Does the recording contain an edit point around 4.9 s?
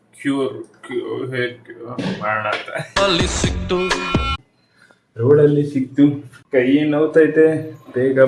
no; 1 cut; at 2.9 s

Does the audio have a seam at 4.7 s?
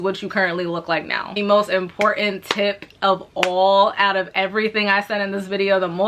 no; 1 cut; at 1.3 s

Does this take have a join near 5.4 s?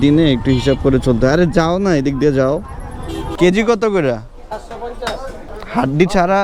yes; 2 cuts; at 3.2 s, 5.4 s

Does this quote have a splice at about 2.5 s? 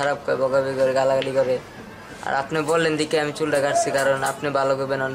no; 0 cuts

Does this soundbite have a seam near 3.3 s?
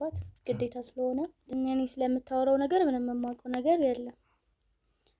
no; 1 cut; at 1.5 s

